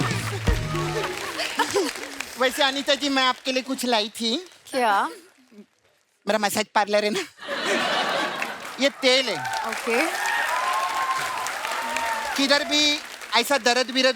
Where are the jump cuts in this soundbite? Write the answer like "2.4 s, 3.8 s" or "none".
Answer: 1.2 s